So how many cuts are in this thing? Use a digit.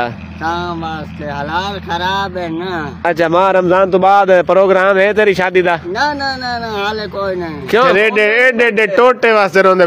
1